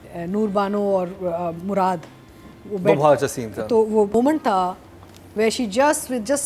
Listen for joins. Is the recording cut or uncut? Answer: cut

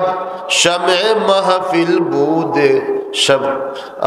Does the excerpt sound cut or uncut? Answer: uncut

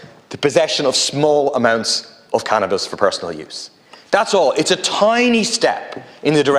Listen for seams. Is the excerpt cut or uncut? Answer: uncut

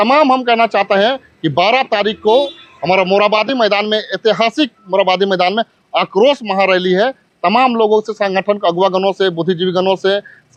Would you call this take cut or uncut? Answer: uncut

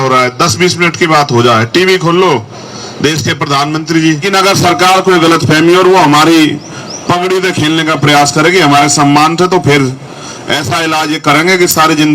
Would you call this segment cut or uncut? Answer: cut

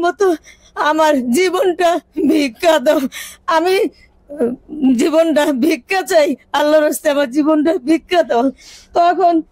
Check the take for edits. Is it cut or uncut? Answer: uncut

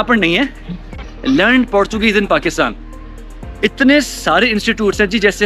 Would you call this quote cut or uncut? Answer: cut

